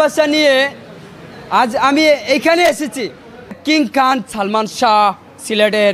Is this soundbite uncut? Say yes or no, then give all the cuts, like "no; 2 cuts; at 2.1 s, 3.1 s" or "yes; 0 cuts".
no; 1 cut; at 3.6 s